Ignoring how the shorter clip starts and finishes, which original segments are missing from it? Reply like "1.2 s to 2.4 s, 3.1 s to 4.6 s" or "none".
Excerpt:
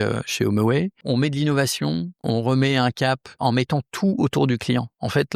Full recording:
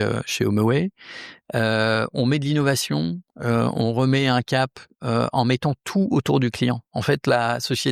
1.0 s to 2.1 s, 3.3 s to 3.7 s, 4.9 s to 5.3 s

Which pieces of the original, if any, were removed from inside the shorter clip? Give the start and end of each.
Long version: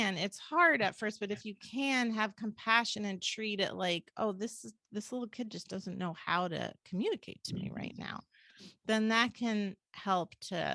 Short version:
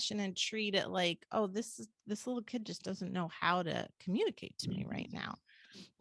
none

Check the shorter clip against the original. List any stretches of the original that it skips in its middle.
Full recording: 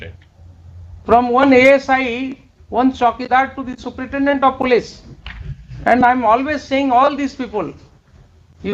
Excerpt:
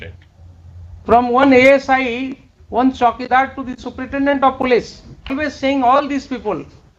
5.4 s to 6.5 s

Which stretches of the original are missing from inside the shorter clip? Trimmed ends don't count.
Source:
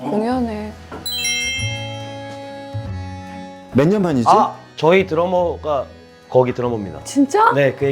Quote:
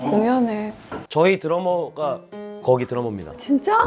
1.0 s to 4.6 s

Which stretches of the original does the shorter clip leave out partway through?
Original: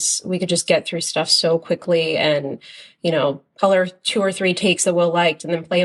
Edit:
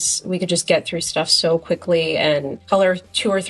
2.6 s to 3.5 s

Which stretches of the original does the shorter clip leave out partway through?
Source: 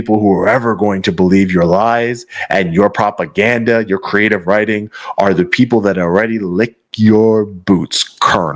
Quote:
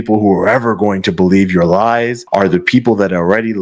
2.2 s to 5.0 s

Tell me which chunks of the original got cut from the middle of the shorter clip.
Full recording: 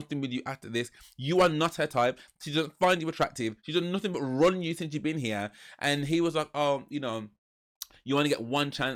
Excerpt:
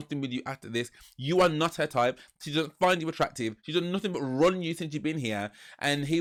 none

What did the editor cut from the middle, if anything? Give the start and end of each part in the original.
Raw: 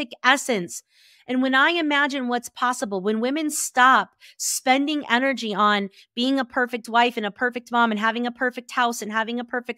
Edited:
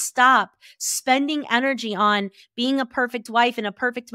none

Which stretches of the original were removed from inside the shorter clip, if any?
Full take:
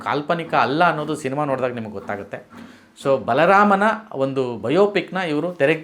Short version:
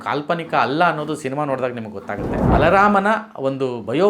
2.5 s to 3.2 s

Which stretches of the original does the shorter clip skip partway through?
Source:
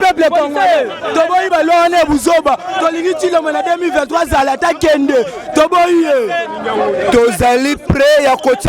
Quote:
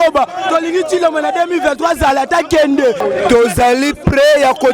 5.3 s to 6.8 s

